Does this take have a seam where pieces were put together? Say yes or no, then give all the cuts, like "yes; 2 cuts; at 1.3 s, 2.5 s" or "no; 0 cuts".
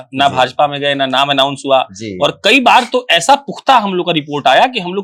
no; 0 cuts